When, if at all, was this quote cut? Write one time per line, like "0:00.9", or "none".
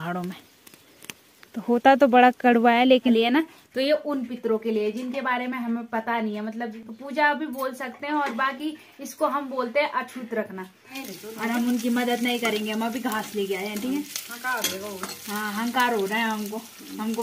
0:03.1
0:06.7
0:11.0